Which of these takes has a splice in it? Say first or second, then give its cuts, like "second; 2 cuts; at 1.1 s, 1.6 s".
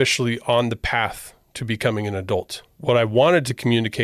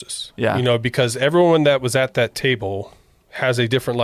first; 1 cut; at 2.6 s